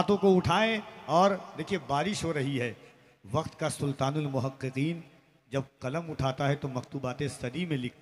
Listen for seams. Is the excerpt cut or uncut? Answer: uncut